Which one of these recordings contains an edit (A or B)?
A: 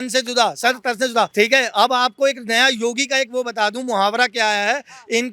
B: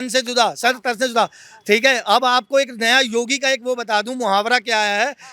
A